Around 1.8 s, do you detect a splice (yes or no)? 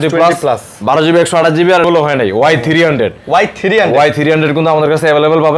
yes